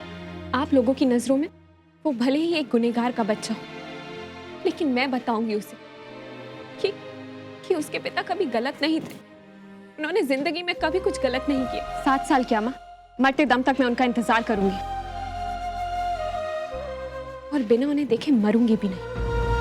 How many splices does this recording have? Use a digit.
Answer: 1